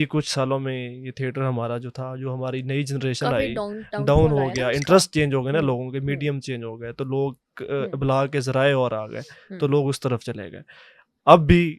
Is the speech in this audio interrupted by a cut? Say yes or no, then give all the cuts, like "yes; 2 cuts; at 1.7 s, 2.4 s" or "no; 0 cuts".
no; 0 cuts